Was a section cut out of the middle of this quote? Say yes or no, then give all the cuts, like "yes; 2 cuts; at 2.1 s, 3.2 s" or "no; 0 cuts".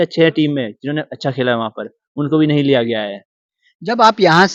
no; 0 cuts